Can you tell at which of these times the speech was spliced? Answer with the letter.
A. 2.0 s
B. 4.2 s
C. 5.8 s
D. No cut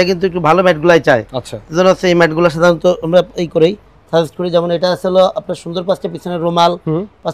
D